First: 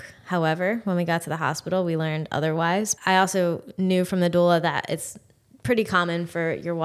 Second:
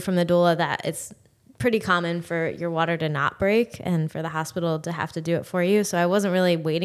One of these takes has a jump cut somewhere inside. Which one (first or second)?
first